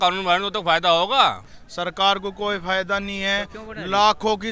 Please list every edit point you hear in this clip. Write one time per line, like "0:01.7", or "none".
0:01.6